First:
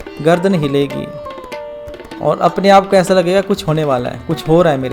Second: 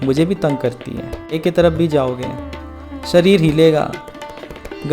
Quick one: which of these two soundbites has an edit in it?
second; 1 cut; at 1.3 s

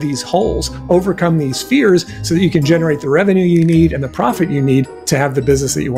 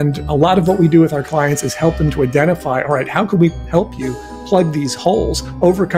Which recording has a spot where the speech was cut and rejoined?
first; 1 cut; at 5.0 s

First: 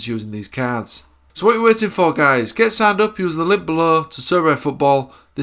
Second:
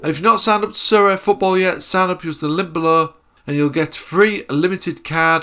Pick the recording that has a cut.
first; 1 cut; at 1.1 s

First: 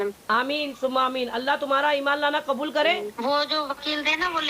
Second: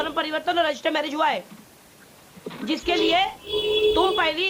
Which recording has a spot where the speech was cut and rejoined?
first; 1 cut; at 3.1 s

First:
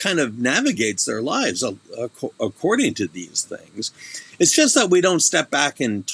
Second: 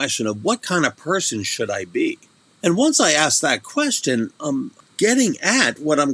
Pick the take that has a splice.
second; 2 cuts; at 2.4 s, 4.8 s

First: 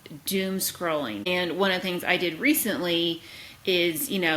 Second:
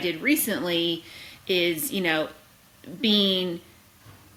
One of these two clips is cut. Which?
first; 1 cut; at 1.3 s

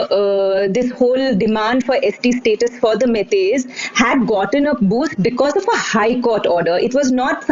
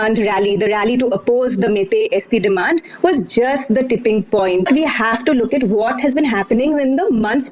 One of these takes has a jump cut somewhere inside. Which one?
second; 1 cut; at 4.7 s

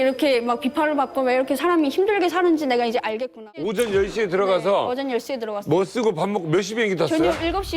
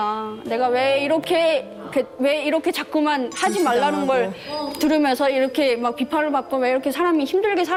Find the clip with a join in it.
first; 1 cut; at 3.5 s

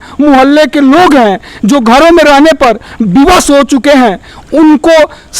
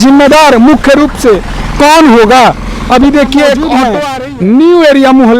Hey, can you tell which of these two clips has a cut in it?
second; 1 cut; at 3.8 s

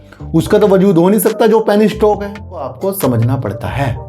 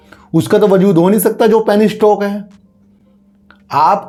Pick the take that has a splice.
first; 1 cut; at 2.7 s

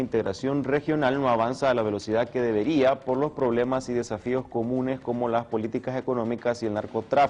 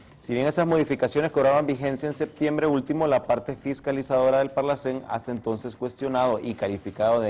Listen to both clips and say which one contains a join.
second; 1 cut; at 3.4 s

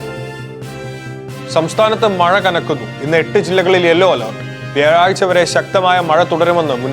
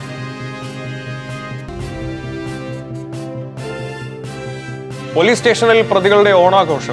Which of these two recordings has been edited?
first; 1 cut; at 1.0 s

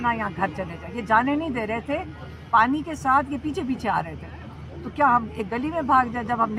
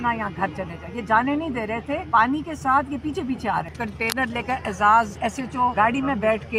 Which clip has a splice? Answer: second; 3 cuts; at 2.0 s, 3.8 s, 5.5 s

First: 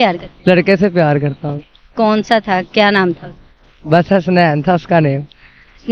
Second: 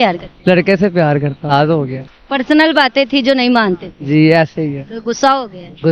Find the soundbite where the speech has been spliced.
second; 1 cut; at 1.5 s

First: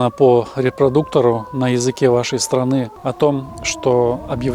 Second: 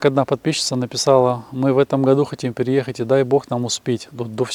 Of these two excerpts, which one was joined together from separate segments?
first; 1 cut; at 2.9 s

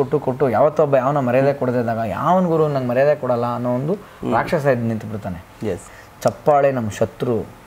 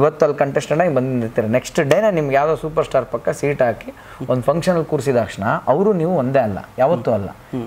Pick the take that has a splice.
first; 1 cut; at 5.8 s

